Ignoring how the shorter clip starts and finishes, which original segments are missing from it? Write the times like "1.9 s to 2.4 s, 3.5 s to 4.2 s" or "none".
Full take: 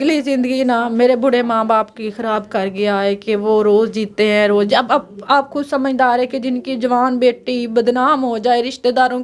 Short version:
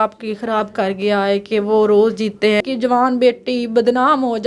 4.4 s to 6.6 s